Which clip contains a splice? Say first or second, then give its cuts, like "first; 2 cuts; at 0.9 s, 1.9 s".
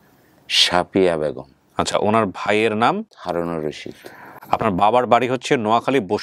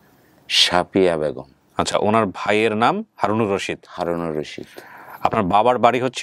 first; 1 cut; at 3.1 s